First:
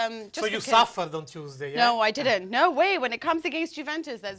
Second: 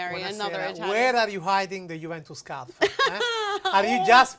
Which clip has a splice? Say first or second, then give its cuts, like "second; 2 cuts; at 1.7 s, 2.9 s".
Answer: first; 1 cut; at 2.4 s